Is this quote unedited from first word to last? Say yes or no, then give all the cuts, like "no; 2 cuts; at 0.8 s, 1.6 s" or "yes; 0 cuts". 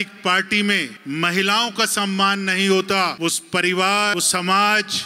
no; 3 cuts; at 0.9 s, 3.1 s, 4.1 s